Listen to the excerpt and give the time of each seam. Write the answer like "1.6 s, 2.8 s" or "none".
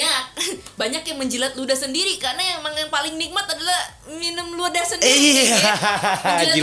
none